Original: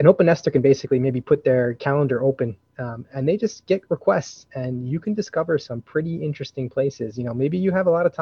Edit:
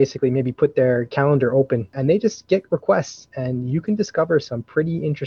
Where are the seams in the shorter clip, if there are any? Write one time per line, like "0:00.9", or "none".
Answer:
0:01.9